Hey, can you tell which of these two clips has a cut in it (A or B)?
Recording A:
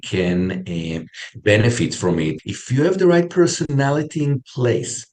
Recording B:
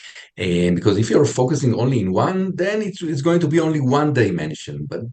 A